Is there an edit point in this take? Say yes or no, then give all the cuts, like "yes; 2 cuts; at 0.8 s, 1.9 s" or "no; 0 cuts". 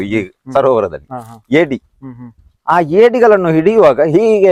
no; 0 cuts